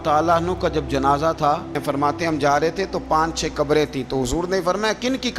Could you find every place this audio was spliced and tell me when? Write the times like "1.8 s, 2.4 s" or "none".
1.8 s